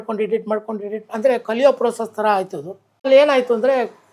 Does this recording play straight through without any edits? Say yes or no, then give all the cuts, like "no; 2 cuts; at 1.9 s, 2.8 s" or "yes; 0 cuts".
no; 1 cut; at 3.1 s